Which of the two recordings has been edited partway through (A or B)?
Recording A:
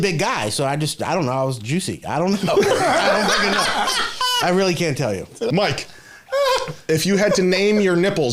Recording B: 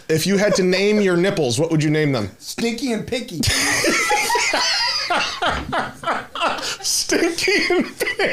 A